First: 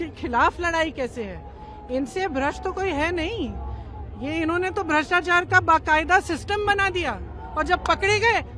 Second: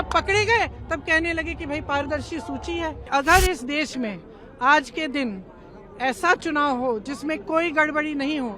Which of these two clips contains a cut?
second; 1 cut; at 3.1 s

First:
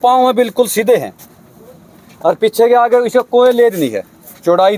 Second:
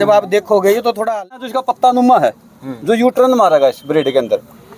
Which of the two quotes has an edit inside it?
second; 1 cut; at 1.3 s

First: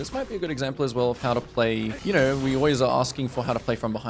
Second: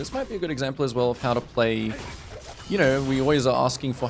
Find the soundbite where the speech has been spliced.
first; 1 cut; at 1.9 s

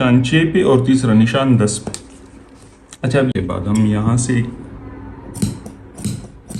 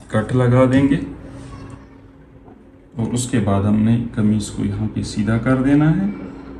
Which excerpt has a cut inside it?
first; 1 cut; at 3.3 s

